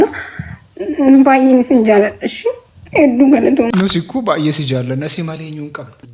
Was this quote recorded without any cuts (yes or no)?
no